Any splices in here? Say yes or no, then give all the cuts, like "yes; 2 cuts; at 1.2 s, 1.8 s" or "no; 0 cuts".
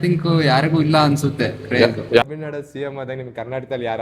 yes; 1 cut; at 2.2 s